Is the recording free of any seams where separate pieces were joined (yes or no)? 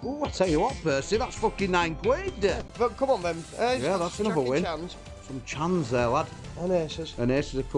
no